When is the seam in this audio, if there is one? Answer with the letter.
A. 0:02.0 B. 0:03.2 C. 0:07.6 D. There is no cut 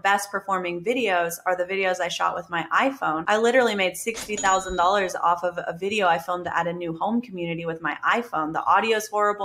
B